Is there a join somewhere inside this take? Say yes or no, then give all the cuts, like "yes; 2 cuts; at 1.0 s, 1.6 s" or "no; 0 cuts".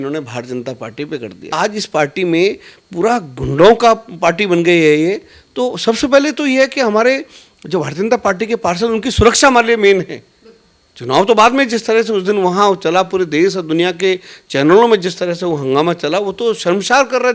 yes; 1 cut; at 1.5 s